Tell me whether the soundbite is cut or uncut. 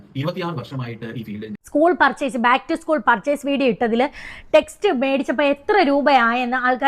cut